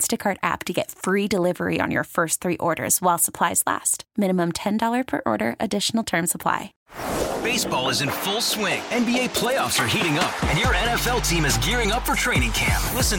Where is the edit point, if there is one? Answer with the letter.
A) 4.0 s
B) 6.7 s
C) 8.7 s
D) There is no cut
B